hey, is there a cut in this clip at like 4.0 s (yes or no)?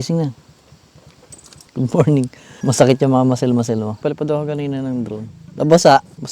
yes